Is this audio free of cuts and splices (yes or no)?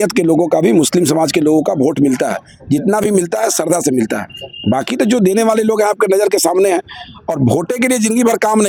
yes